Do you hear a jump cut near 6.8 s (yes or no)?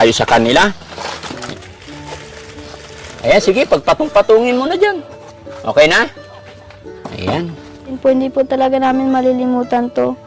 no